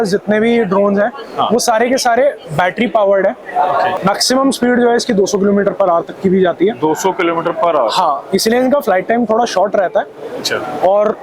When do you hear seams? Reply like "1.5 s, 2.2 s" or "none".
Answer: 4.0 s

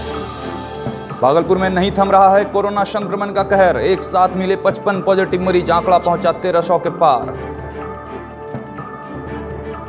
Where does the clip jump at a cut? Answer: 1.0 s

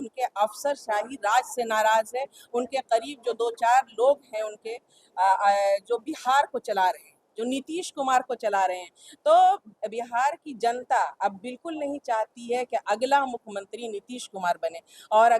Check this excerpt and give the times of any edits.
none

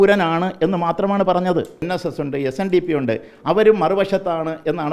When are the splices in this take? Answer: 1.8 s

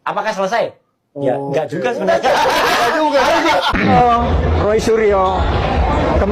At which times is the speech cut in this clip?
3.9 s

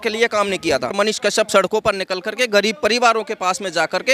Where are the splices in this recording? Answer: 0.9 s

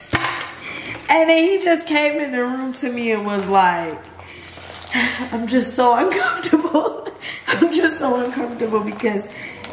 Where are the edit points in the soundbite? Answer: none

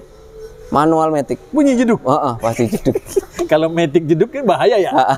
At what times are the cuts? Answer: none

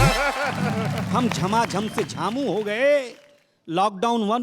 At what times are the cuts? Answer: 1.0 s

